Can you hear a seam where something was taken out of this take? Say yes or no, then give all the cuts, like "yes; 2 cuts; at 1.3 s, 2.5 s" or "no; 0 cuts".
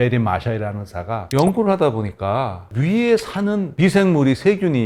no; 0 cuts